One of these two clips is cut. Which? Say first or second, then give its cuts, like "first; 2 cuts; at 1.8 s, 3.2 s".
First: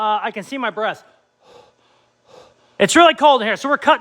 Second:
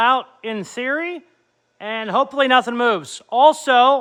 first; 1 cut; at 2.7 s